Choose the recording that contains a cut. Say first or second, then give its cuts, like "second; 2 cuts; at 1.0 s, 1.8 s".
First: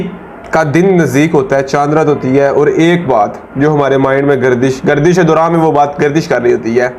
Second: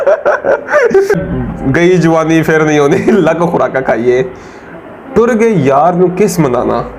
second; 1 cut; at 1.1 s